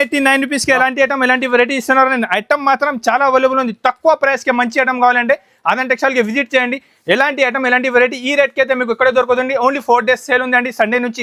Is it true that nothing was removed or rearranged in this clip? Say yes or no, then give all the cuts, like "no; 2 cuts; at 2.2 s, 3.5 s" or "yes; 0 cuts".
yes; 0 cuts